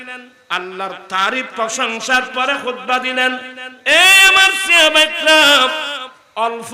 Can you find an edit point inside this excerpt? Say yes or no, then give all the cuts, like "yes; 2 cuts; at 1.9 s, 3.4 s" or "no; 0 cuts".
no; 0 cuts